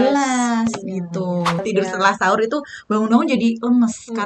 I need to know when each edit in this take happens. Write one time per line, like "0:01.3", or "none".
0:01.6